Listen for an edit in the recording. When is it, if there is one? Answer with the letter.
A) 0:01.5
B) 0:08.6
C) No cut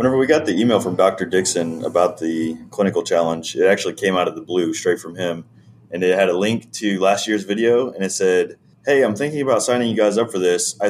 B